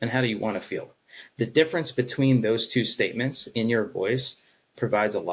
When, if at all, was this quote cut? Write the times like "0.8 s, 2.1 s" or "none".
none